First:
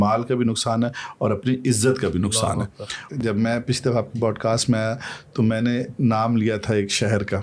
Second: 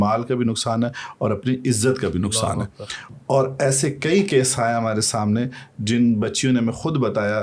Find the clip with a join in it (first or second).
first